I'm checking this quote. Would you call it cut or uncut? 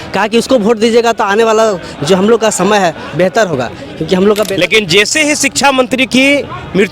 cut